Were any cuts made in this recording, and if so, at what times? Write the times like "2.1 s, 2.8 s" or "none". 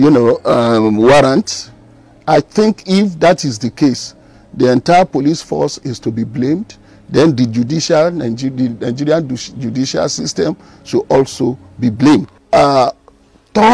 12.4 s